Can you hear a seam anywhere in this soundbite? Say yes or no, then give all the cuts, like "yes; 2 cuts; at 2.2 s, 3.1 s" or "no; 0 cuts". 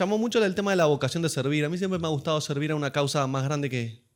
no; 0 cuts